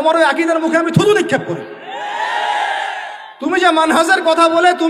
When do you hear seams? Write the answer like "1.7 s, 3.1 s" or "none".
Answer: none